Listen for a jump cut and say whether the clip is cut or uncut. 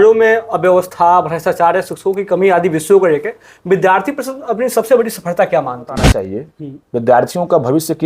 cut